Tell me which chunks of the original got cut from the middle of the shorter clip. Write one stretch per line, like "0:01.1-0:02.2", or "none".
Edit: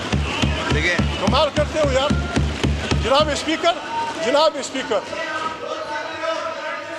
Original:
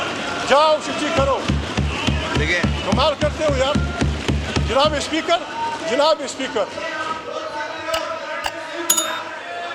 none